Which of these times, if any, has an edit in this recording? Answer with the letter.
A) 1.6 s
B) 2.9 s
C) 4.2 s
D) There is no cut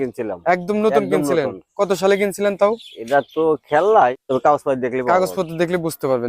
C